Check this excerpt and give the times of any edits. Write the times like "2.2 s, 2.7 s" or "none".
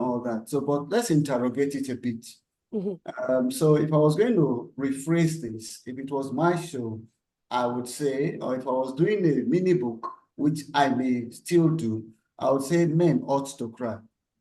none